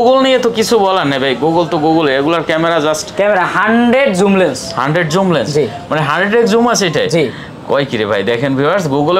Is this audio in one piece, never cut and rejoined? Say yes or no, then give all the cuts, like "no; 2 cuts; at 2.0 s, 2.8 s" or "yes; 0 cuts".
yes; 0 cuts